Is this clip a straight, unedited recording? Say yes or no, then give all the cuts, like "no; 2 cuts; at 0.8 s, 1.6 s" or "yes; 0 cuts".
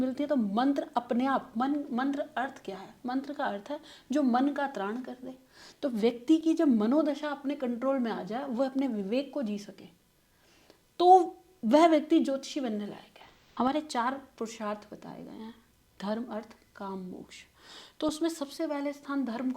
no; 1 cut; at 13.4 s